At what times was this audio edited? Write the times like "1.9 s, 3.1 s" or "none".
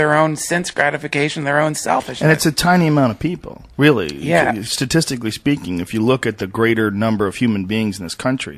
none